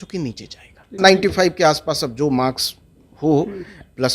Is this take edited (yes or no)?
yes